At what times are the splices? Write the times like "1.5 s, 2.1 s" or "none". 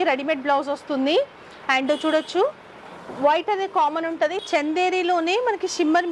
4.4 s

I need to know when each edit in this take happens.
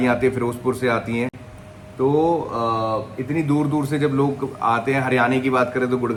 none

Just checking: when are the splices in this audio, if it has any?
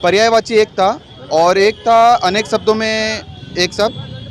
none

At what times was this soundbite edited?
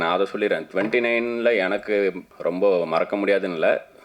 2.3 s

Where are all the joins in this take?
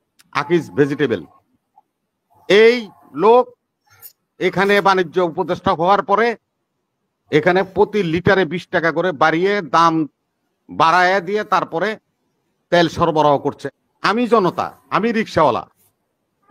13.7 s

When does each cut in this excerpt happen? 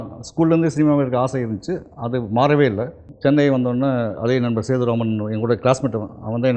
3.0 s

